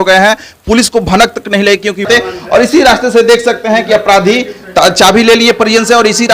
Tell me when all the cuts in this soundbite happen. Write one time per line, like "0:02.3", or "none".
0:02.1